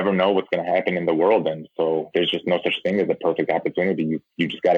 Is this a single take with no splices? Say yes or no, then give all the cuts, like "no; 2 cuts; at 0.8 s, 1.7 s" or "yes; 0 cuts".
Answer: no; 1 cut; at 2.1 s